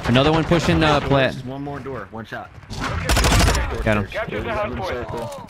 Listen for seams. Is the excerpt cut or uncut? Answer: uncut